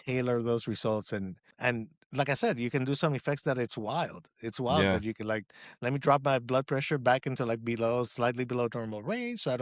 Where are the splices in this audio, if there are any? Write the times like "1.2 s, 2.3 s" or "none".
1.4 s